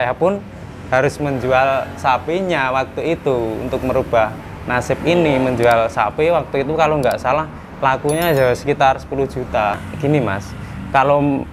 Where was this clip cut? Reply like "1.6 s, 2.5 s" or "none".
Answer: 9.8 s